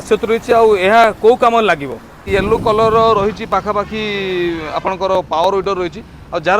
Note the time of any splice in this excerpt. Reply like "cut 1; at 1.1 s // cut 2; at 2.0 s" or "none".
cut 1; at 2.3 s